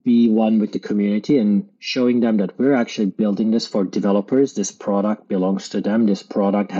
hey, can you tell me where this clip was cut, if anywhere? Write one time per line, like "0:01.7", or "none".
none